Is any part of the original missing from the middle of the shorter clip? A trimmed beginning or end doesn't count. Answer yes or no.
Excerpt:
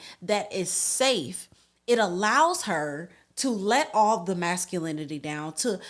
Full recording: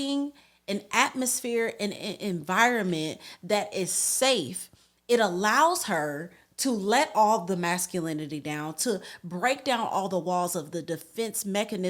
no